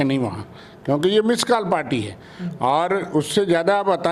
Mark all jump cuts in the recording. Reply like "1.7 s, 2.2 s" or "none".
none